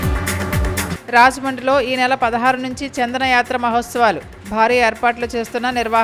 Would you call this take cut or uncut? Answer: cut